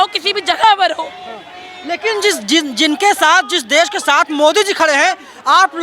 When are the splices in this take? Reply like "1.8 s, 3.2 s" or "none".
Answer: none